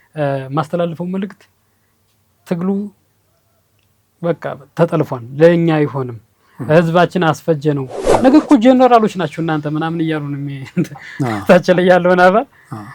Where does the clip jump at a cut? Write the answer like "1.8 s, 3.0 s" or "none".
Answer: 8.0 s